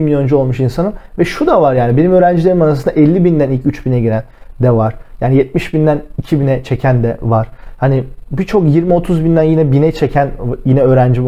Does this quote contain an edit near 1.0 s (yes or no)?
no